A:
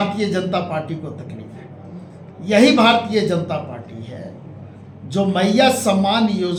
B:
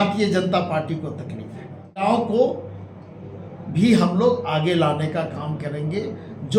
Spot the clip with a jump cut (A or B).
B